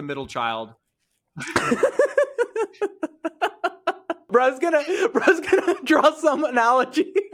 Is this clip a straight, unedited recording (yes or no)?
no